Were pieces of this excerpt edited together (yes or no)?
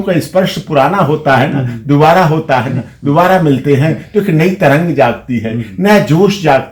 no